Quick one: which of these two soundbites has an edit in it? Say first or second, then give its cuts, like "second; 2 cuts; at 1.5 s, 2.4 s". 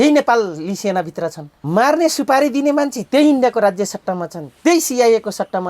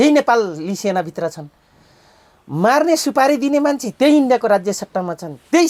first; 1 cut; at 1.5 s